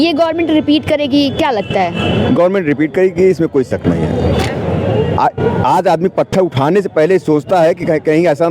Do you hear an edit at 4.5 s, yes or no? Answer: yes